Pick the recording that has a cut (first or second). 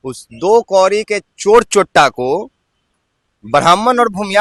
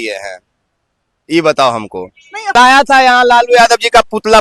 second